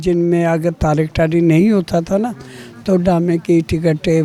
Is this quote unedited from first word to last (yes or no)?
yes